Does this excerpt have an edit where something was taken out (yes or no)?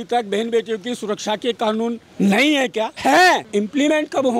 yes